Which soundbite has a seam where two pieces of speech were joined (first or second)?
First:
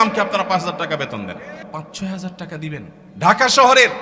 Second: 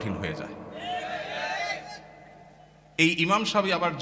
first